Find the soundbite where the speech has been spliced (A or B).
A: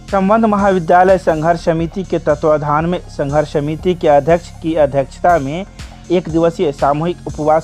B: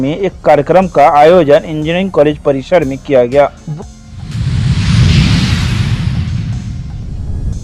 B